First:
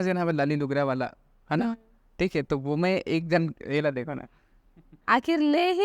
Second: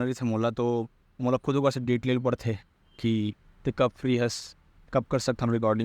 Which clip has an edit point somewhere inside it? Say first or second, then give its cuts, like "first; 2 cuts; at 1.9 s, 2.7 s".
first; 1 cut; at 4.9 s